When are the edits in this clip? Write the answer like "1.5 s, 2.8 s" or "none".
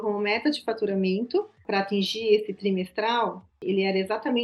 1.6 s